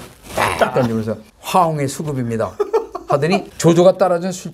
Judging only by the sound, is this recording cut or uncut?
cut